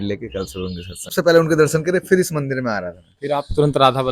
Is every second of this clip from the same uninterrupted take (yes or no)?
no